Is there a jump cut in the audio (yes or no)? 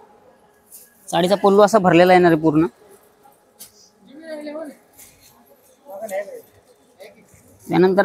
no